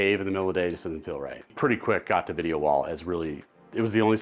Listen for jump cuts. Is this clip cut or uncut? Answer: cut